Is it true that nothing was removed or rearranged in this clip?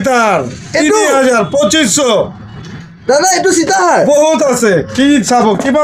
yes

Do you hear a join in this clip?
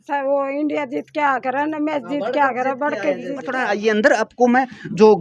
yes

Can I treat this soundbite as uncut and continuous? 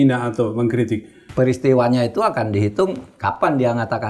no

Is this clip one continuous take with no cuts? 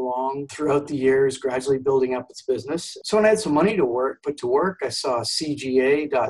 no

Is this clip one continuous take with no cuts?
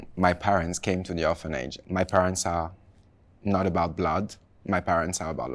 no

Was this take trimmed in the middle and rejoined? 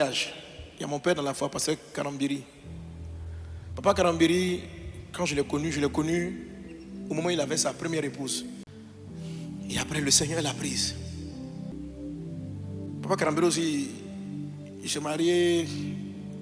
yes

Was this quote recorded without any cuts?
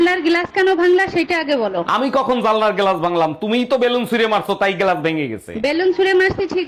yes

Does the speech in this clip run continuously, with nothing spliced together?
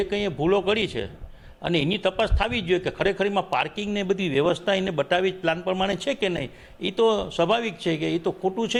yes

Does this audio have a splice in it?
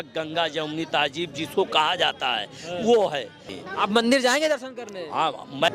no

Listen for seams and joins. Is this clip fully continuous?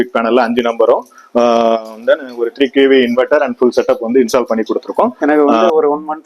no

